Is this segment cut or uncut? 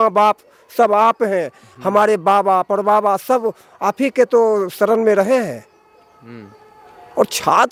uncut